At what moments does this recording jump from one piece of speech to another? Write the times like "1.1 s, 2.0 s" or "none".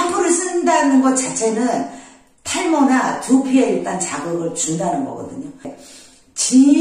5.8 s

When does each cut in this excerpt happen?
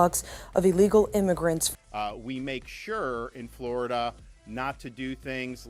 none

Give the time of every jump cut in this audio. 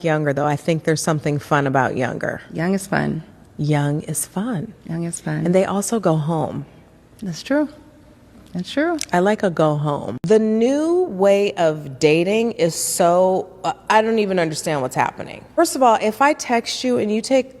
9.9 s, 15.6 s

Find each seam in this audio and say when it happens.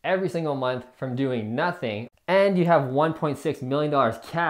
2.0 s

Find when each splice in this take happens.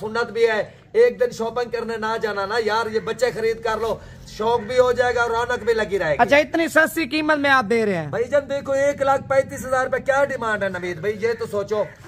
none

